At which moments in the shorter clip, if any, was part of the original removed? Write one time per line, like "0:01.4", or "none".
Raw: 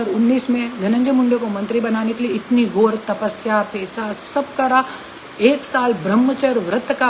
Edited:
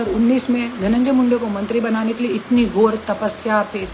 none